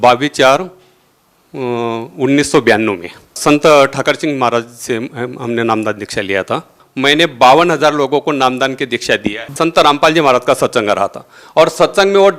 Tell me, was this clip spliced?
yes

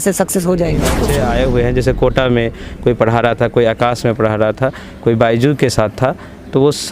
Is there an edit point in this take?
yes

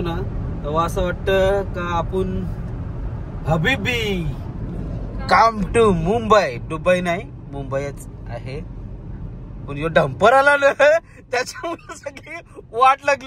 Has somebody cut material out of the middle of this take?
no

